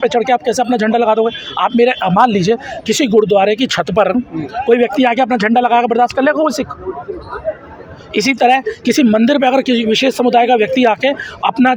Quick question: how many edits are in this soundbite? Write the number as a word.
zero